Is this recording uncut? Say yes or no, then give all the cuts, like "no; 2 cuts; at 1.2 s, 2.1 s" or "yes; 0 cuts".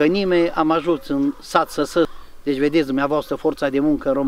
no; 1 cut; at 2.1 s